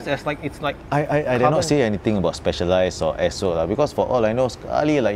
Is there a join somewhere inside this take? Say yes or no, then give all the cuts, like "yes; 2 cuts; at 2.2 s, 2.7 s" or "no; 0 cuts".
no; 0 cuts